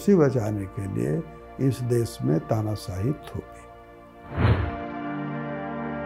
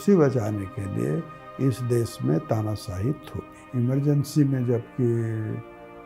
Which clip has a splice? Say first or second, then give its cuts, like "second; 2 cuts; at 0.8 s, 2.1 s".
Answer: second; 1 cut; at 3.6 s